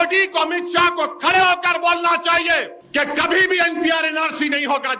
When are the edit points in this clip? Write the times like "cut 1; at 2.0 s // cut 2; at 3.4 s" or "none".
cut 1; at 2.8 s